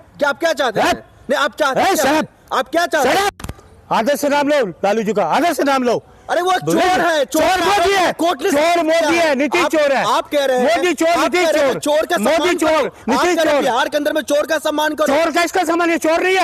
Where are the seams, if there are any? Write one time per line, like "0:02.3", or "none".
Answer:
none